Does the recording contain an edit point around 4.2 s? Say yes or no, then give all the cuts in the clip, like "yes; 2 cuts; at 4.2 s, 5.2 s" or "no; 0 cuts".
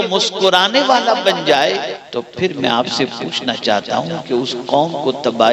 no; 1 cut; at 2.0 s